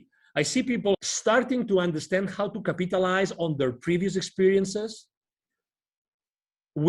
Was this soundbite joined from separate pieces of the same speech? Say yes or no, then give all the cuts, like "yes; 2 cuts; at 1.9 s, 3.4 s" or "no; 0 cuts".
yes; 1 cut; at 0.9 s